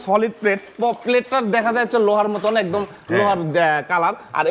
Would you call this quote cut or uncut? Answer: uncut